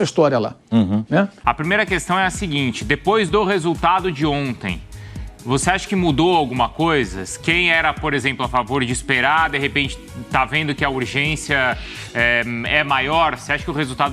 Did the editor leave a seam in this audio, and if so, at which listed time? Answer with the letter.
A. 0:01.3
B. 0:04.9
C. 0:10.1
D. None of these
A